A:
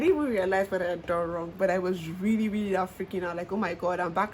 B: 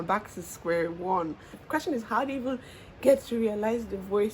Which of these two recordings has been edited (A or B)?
B